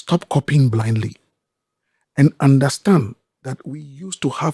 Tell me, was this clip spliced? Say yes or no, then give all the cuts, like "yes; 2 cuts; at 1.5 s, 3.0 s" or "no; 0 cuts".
no; 0 cuts